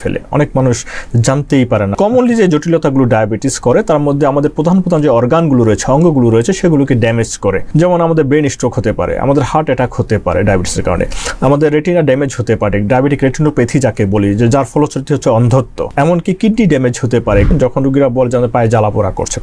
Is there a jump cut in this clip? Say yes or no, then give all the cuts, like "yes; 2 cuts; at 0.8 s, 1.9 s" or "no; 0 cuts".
yes; 4 cuts; at 2.0 s, 7.6 s, 15.8 s, 17.5 s